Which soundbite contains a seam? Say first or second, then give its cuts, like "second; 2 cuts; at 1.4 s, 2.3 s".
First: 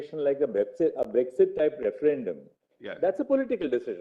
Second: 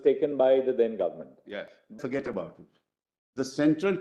second; 1 cut; at 1.9 s